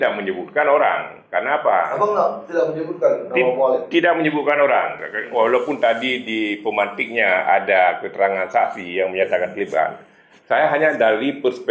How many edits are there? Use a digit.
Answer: 0